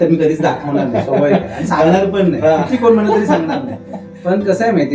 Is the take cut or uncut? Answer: uncut